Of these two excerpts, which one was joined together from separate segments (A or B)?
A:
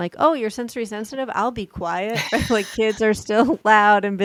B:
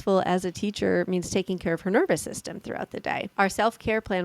B